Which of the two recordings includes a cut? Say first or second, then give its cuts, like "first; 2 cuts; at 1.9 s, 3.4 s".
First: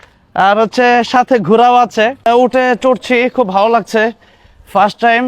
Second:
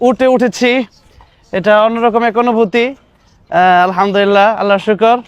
first; 1 cut; at 2.3 s